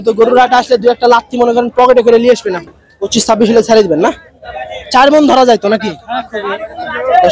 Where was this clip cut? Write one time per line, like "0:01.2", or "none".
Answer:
0:02.8

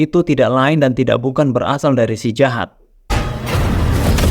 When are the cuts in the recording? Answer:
0:03.1

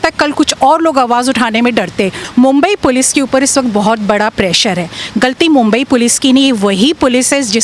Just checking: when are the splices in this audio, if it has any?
0:02.2

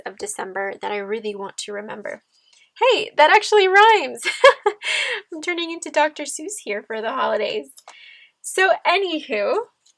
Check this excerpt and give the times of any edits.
none

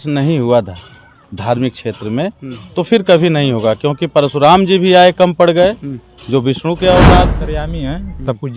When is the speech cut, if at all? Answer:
0:07.4

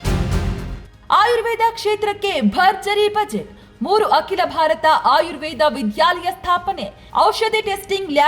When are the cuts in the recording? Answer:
0:01.1

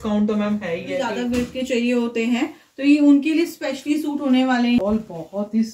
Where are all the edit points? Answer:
0:01.1
0:04.8

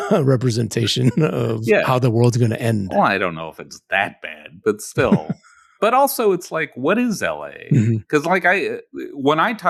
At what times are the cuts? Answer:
none

